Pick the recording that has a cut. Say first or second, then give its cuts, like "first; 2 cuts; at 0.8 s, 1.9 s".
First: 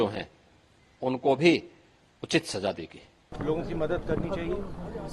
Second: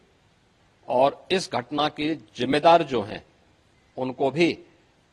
first; 1 cut; at 3.3 s